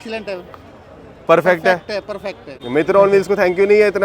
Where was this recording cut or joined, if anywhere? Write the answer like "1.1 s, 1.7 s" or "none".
2.6 s